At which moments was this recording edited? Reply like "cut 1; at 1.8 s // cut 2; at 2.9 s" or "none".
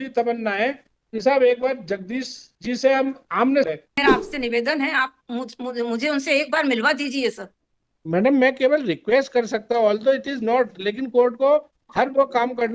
cut 1; at 3.7 s